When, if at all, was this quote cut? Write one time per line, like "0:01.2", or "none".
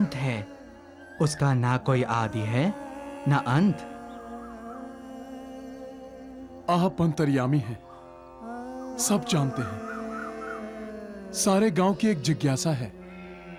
none